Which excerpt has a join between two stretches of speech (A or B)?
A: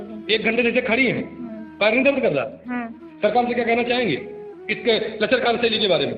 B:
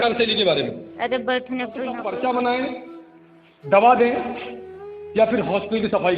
B